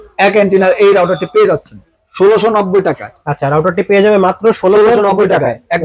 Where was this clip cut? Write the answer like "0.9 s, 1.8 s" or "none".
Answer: 1.9 s